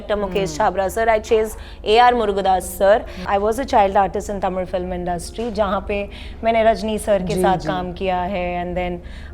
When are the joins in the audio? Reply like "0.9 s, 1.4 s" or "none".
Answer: 3.2 s